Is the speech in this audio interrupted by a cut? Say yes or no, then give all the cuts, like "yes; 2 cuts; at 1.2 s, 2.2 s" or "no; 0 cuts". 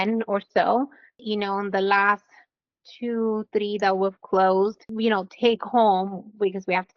yes; 2 cuts; at 1.1 s, 4.8 s